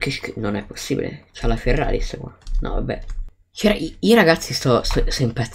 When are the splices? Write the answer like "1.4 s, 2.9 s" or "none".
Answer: 3.3 s